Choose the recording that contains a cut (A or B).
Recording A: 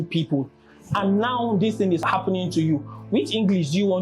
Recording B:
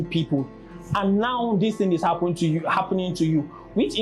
A